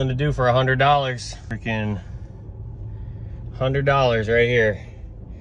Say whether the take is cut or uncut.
cut